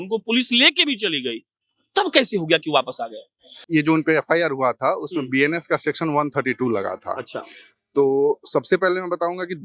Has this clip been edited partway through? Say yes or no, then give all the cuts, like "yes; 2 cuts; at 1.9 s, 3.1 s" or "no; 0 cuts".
yes; 1 cut; at 3.5 s